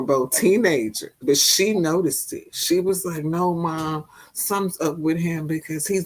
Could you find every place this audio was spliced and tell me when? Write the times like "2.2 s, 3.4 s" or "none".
1.1 s